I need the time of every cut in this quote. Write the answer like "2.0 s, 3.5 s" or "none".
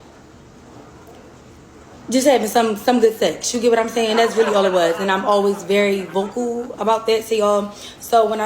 3.9 s, 7.5 s